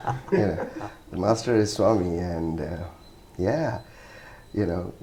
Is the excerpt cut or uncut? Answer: uncut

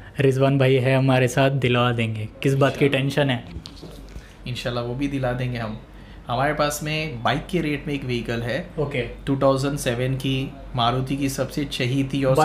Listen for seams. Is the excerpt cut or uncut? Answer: uncut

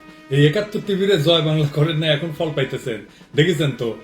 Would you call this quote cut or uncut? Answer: uncut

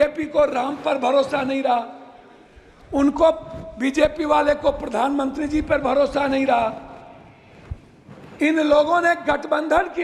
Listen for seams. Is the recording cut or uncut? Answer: uncut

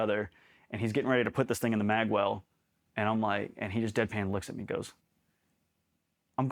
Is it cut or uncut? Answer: uncut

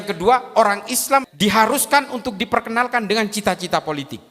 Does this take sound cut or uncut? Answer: cut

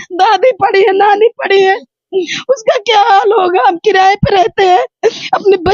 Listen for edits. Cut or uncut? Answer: uncut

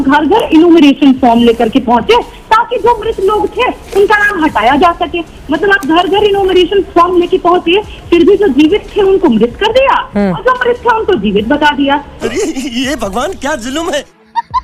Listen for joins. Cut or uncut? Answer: uncut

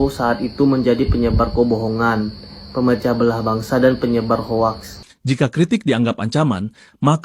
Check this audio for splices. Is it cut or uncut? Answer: cut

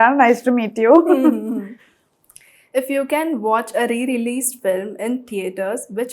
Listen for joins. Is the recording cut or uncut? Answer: uncut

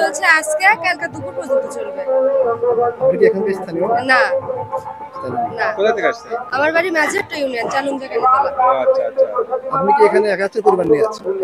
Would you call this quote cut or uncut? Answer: uncut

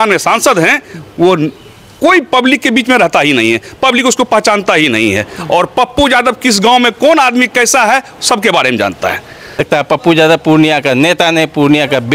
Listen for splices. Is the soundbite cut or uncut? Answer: cut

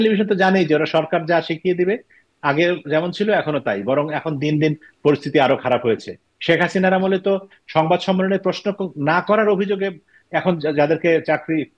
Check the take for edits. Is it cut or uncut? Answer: uncut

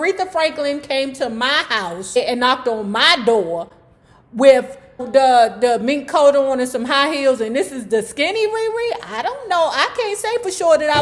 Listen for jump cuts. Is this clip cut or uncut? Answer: cut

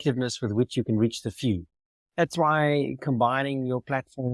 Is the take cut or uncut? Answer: cut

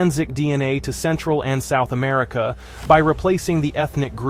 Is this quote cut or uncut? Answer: uncut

